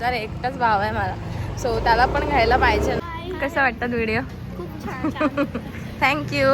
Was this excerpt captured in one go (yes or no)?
no